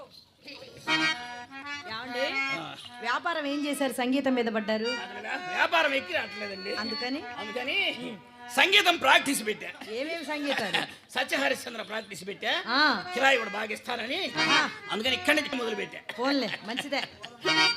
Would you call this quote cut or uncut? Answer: cut